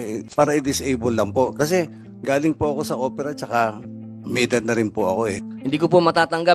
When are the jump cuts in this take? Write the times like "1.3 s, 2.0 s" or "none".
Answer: 5.4 s